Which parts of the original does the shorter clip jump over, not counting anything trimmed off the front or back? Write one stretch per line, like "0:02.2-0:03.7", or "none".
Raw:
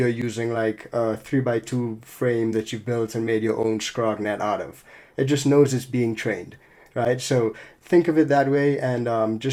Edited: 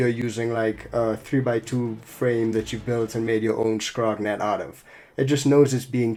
none